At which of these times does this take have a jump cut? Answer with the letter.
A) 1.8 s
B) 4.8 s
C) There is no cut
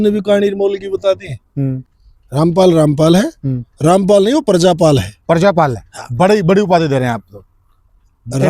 A